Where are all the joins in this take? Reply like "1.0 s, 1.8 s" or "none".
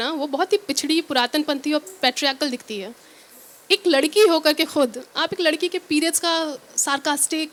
none